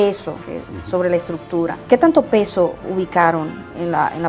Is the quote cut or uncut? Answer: cut